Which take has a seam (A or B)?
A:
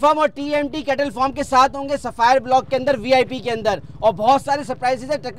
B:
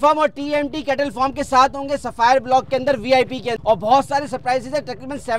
B